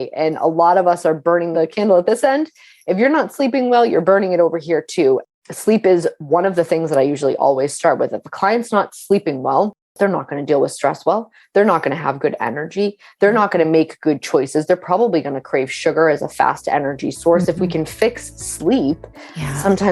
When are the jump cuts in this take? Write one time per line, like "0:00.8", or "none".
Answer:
0:01.5
0:05.2
0:09.8